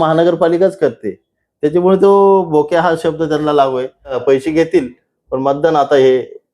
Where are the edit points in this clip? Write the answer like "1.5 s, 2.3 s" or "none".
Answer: 4.2 s